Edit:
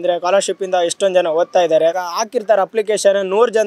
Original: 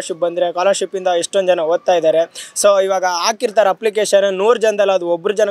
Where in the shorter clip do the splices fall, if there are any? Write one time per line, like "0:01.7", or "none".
0:02.1